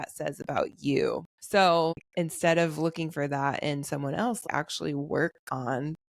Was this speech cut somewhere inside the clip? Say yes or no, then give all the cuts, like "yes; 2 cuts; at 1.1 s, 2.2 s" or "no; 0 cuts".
yes; 3 cuts; at 1.3 s, 2.0 s, 4.4 s